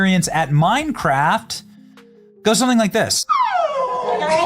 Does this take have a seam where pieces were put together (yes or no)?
yes